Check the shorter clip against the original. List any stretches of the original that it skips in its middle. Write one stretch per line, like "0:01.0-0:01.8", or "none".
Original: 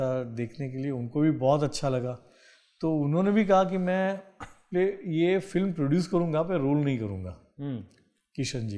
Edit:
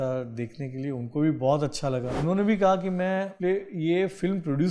0:02.2-0:03.1
0:04.2-0:04.6